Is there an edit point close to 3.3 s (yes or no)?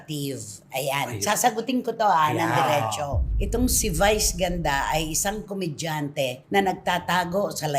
yes